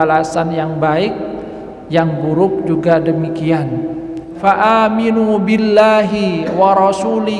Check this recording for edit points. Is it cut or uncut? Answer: cut